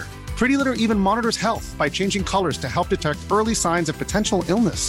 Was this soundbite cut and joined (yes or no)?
no